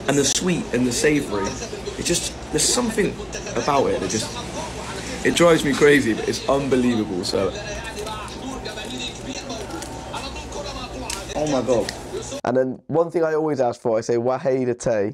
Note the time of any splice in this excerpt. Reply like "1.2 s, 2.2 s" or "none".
12.3 s